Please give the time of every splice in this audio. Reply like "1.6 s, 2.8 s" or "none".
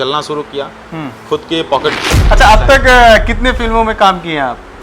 2.0 s